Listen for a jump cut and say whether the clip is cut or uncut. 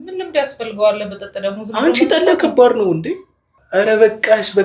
cut